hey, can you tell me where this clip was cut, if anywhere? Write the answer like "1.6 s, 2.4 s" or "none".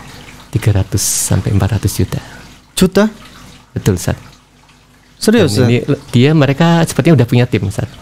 6.1 s